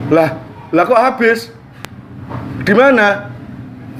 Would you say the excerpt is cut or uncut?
uncut